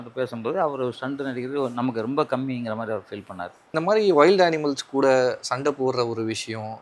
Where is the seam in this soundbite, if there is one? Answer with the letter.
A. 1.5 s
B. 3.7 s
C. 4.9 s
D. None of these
B